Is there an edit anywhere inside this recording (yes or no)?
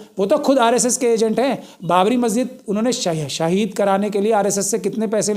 no